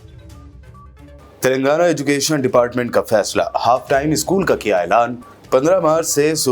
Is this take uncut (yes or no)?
no